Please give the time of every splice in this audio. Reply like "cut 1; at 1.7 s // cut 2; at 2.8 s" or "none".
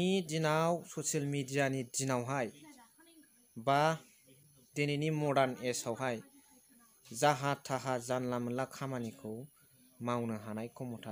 none